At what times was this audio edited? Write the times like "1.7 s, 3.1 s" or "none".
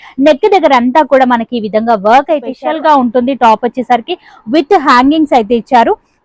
2.5 s